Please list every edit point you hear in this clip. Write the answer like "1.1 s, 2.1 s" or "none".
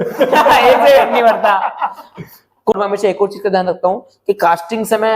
2.7 s